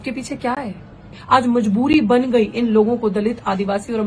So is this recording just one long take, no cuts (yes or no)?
no